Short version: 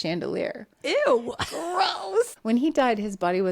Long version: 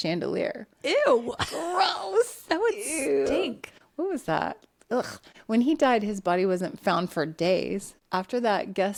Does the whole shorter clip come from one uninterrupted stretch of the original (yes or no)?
no